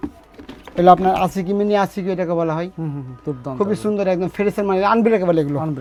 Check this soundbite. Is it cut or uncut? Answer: uncut